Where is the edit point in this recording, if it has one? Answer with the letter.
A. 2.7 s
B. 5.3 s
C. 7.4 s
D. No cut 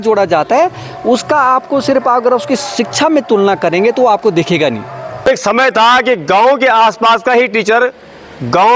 B